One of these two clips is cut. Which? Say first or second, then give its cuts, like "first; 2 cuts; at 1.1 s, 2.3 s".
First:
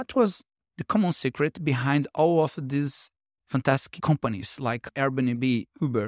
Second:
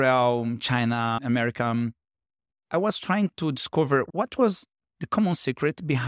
second; 1 cut; at 1.2 s